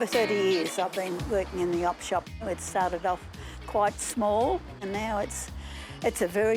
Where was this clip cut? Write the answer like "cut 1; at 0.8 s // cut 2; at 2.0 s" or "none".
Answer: cut 1; at 2.4 s // cut 2; at 4.8 s